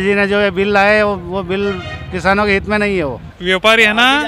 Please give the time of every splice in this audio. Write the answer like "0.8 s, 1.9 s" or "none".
3.3 s